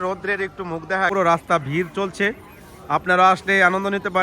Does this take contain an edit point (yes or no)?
yes